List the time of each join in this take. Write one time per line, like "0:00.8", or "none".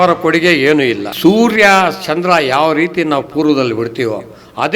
0:01.1